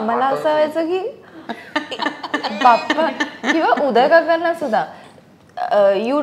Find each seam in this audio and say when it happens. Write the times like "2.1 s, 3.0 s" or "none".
none